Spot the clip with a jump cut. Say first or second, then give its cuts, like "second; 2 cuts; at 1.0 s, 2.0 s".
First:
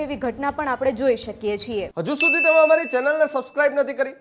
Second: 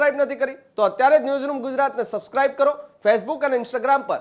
first; 1 cut; at 1.9 s